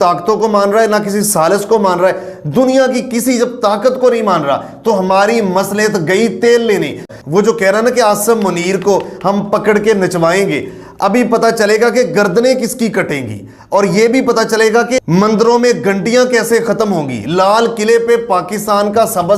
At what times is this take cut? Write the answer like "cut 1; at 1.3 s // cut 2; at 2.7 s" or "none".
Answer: cut 1; at 7.0 s